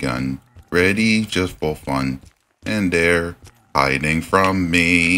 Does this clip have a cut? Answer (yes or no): no